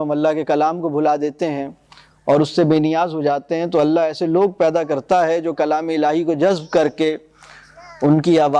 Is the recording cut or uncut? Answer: uncut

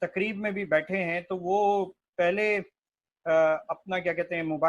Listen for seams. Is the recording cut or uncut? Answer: uncut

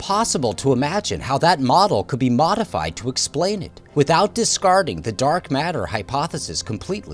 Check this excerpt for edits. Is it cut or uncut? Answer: uncut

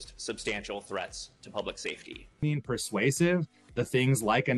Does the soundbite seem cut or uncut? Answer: uncut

